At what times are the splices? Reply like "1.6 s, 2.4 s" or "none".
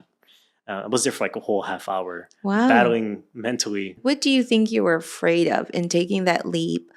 4.0 s